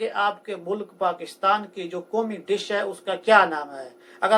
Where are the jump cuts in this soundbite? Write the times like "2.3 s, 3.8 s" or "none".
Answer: none

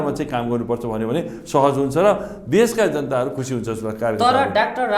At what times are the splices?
none

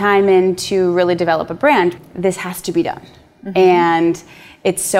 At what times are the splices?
2.0 s

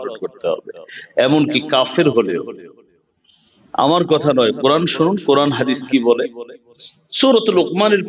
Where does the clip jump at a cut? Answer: none

